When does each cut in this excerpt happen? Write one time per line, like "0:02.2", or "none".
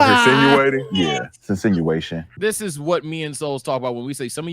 0:02.2